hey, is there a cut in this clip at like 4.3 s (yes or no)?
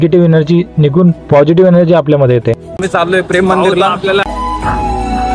yes